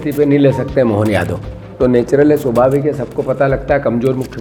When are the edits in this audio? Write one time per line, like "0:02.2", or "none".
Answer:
none